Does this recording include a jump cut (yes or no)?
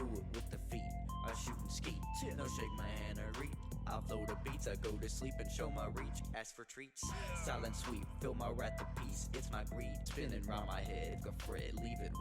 yes